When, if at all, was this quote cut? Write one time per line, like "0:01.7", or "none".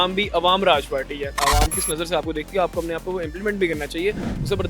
0:01.4